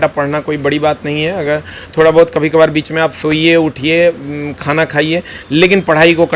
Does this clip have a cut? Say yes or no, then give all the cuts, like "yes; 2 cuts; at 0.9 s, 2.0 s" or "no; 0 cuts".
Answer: no; 0 cuts